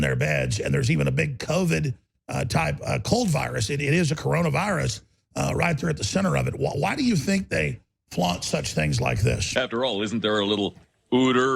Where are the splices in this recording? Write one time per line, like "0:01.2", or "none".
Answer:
0:09.5